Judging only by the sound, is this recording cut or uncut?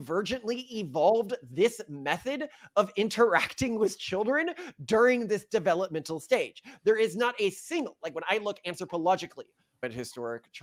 uncut